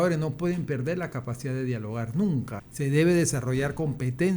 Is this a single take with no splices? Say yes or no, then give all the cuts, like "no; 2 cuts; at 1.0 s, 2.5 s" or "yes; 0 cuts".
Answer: no; 1 cut; at 2.6 s